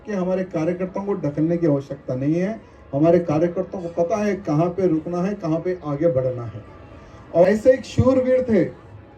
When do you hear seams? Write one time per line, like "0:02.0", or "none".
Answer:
0:07.4